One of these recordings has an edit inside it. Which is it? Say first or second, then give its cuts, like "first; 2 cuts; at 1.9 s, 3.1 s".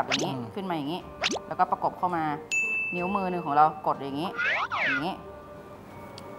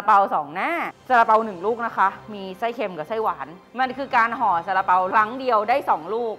second; 3 cuts; at 0.9 s, 3.6 s, 5.1 s